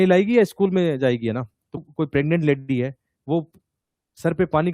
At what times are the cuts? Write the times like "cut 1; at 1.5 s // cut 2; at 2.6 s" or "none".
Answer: cut 1; at 1.8 s